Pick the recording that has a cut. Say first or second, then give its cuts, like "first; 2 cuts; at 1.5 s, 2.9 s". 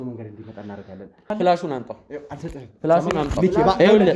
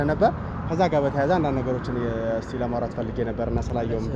first; 1 cut; at 1.2 s